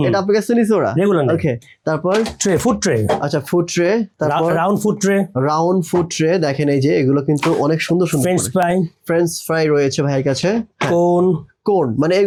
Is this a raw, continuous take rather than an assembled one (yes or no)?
yes